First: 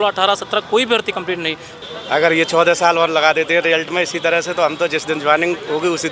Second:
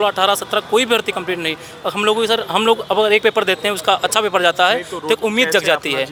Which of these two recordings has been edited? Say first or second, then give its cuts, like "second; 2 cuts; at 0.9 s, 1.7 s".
first; 1 cut; at 1.7 s